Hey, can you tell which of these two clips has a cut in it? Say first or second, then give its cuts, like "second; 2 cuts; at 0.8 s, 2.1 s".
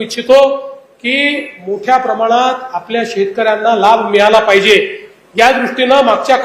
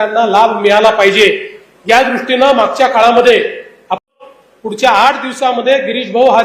second; 1 cut; at 4.0 s